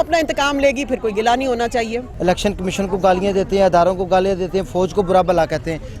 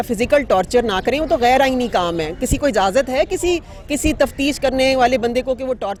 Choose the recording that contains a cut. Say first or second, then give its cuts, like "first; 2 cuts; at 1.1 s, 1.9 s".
first; 1 cut; at 2.0 s